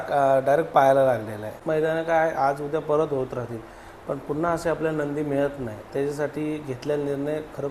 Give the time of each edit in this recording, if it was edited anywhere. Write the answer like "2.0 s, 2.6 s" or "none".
1.6 s